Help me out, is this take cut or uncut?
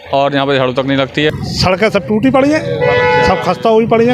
cut